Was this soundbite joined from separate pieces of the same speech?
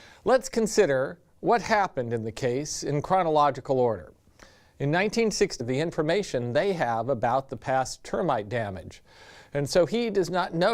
no; 0 cuts

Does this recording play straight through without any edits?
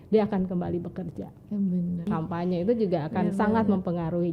no; 1 cut; at 2.1 s

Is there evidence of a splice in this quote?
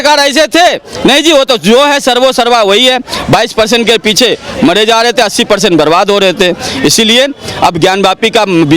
no; 0 cuts

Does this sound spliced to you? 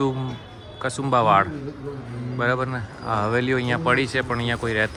no; 0 cuts

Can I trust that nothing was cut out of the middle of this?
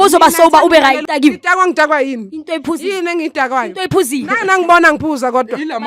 no; 1 cut; at 1.0 s

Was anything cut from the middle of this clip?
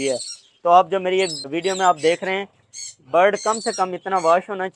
yes; 1 cut; at 1.5 s

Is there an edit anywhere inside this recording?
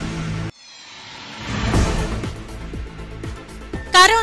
no; 0 cuts

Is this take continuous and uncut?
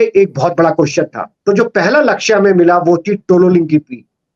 no; 1 cut; at 1.2 s

